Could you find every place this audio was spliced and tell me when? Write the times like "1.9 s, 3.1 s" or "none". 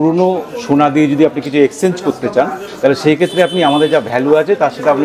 none